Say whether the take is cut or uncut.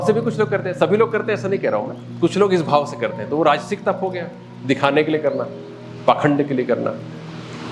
uncut